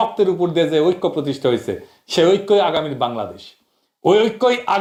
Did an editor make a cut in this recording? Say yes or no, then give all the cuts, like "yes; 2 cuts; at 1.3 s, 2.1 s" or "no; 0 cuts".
no; 0 cuts